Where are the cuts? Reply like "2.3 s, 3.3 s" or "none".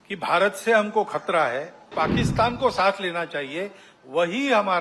1.9 s